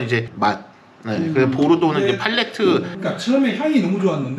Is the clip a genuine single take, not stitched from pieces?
no; 1 cut; at 2.9 s

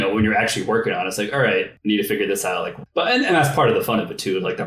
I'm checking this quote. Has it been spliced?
yes; 2 cuts; at 1.7 s, 2.7 s

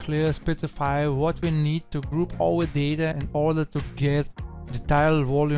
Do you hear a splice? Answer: yes; 1 cut; at 3.2 s

